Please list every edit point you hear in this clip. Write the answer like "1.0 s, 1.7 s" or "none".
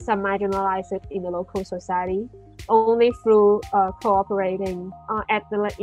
4.9 s